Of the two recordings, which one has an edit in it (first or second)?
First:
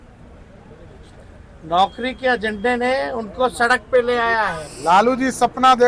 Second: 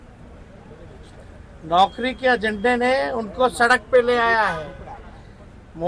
first